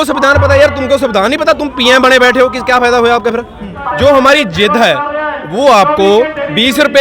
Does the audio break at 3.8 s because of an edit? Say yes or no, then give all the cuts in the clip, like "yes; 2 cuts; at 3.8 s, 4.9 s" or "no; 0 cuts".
yes; 1 cut; at 3.8 s